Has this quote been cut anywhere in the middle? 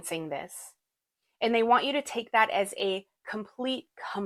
no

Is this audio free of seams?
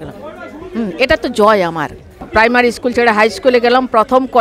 no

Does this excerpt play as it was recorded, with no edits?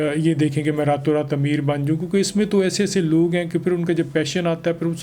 yes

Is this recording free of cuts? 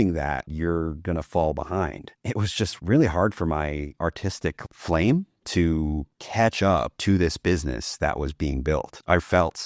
yes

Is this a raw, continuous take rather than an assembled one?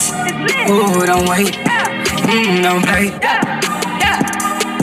yes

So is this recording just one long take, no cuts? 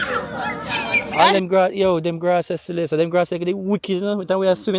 no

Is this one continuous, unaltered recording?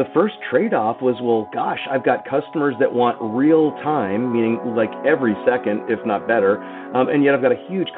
yes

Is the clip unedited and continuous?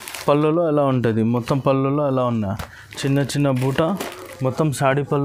yes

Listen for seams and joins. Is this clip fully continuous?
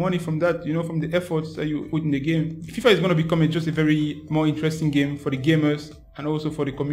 no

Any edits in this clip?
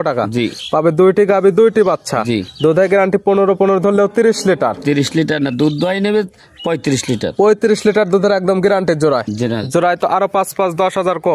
no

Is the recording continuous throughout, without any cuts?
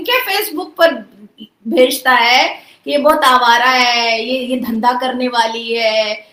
yes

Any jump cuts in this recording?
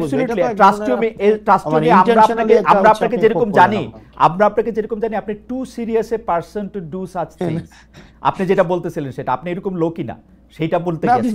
no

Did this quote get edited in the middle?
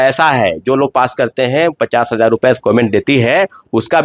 no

